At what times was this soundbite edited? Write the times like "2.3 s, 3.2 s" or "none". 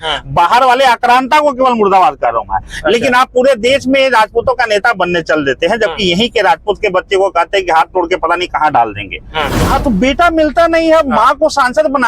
9.6 s